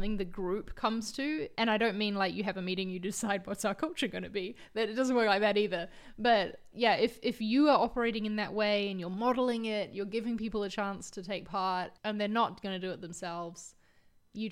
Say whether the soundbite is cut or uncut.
cut